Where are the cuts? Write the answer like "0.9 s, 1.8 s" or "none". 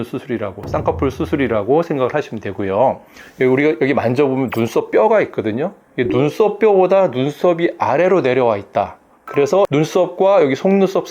3.1 s